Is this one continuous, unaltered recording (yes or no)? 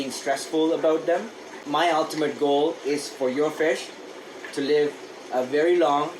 no